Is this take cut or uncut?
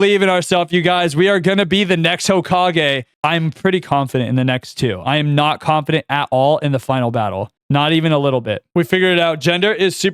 cut